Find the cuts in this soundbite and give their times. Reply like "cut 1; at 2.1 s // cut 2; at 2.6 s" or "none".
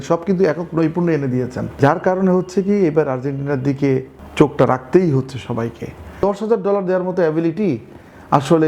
cut 1; at 1.8 s // cut 2; at 4.2 s // cut 3; at 6.2 s